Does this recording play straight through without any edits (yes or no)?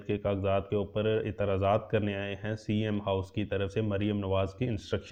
yes